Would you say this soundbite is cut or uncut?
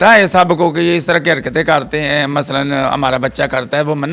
uncut